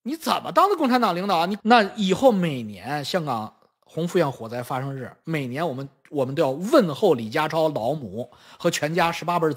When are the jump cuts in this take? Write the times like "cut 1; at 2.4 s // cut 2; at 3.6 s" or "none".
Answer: cut 1; at 1.6 s